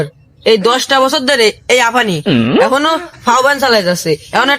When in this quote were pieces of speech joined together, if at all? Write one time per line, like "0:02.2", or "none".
none